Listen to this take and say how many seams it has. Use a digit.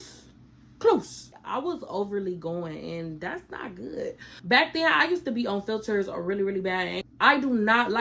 3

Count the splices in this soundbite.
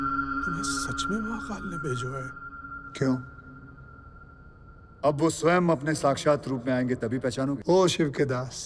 1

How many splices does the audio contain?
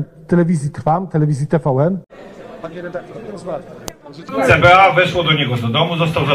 1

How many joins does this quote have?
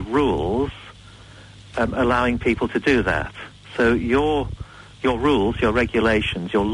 0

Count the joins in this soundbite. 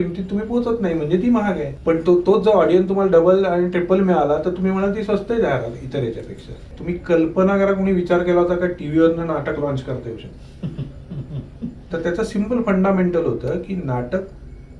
2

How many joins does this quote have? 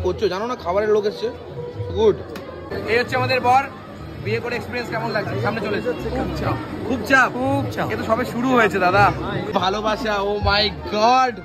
2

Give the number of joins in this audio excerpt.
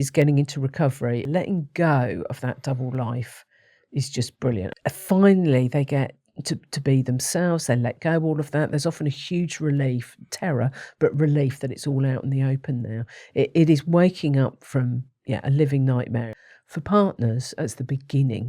3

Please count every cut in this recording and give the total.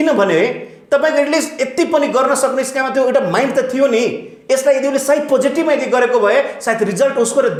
0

